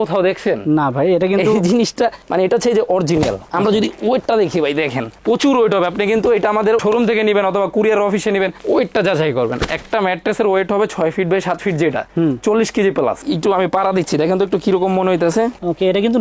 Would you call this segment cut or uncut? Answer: cut